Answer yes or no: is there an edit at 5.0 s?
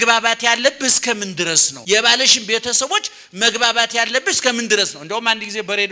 no